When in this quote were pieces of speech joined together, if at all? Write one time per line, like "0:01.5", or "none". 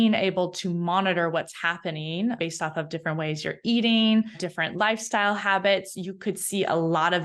0:04.4